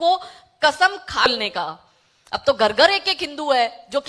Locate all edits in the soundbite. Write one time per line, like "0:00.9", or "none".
0:01.3